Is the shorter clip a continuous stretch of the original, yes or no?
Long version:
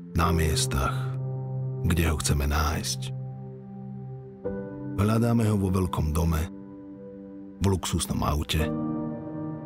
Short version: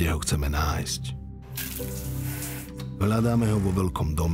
yes